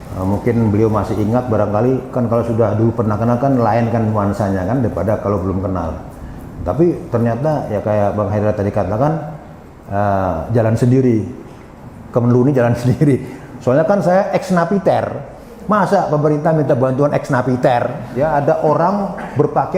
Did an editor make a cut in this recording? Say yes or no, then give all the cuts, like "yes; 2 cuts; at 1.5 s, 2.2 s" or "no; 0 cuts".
yes; 1 cut; at 18.0 s